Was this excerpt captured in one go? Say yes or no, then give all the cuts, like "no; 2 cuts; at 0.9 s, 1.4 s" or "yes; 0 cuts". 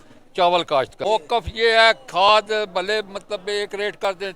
no; 1 cut; at 1.0 s